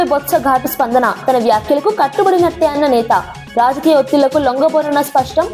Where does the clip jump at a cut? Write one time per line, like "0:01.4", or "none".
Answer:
none